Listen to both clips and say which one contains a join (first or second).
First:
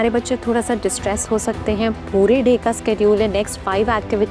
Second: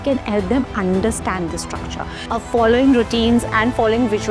second